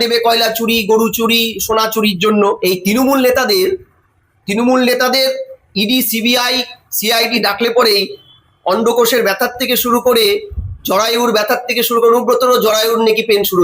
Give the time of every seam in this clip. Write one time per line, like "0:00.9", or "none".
0:02.5